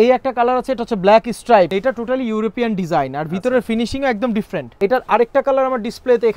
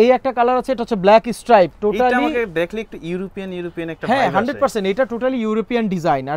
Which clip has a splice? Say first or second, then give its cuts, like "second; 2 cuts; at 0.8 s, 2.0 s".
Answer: first; 2 cuts; at 1.7 s, 4.6 s